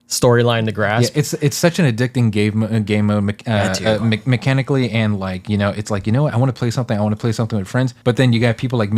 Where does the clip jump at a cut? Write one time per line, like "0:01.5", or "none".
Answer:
0:07.9